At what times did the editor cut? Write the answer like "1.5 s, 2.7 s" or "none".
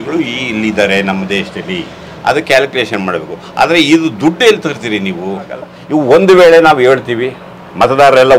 5.7 s